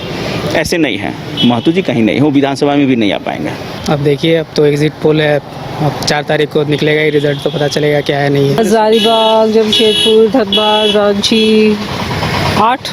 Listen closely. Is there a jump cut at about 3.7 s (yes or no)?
yes